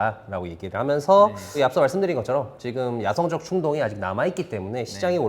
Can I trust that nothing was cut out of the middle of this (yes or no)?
no